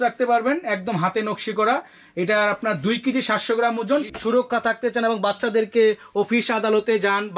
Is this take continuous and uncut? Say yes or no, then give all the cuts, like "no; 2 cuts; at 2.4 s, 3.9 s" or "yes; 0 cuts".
no; 1 cut; at 4.1 s